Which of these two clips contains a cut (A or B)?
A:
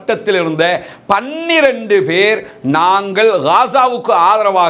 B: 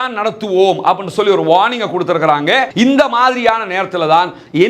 B